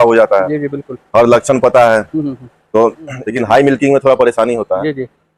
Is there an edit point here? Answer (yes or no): yes